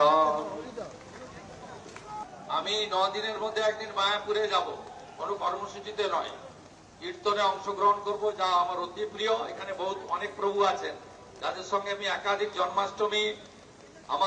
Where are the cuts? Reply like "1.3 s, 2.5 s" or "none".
2.2 s